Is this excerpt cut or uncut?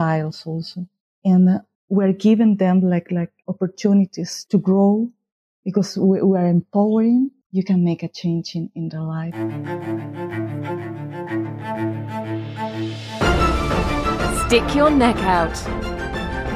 cut